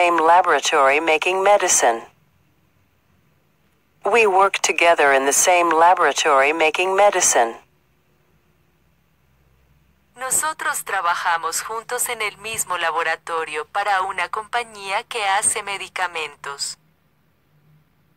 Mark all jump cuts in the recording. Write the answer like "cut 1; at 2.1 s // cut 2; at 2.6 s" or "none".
cut 1; at 2.0 s